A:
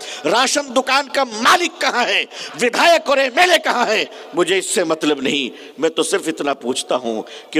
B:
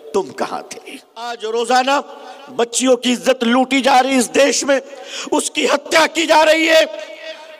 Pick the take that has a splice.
B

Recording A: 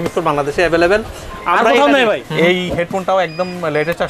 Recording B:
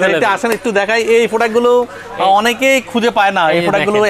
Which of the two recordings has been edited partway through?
A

